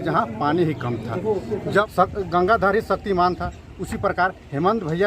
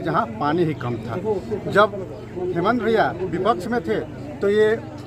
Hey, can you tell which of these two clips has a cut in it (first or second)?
first